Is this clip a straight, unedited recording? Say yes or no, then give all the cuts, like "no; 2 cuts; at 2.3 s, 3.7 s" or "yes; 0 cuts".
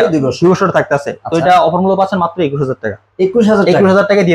yes; 0 cuts